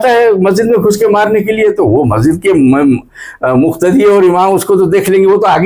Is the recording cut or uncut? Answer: uncut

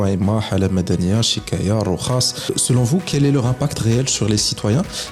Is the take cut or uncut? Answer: cut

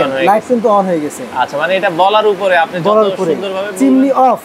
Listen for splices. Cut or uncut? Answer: uncut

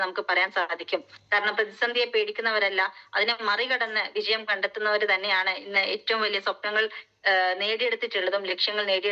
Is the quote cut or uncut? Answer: uncut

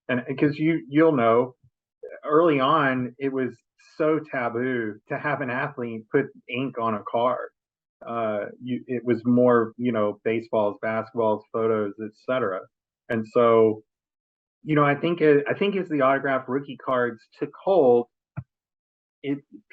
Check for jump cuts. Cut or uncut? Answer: cut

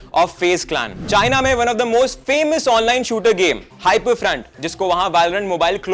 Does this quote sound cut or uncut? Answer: cut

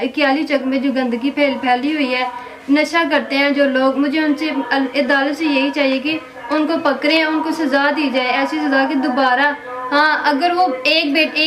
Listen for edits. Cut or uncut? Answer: uncut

